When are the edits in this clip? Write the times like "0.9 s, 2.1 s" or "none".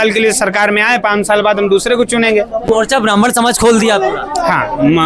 2.7 s